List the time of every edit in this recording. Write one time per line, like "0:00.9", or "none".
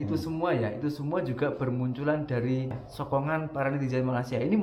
0:02.9